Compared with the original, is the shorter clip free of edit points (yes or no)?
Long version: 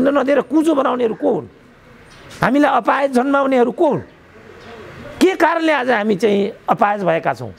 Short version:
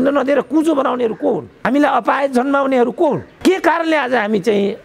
no